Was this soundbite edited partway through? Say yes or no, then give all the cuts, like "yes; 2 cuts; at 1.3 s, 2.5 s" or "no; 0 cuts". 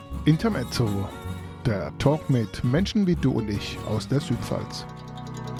no; 0 cuts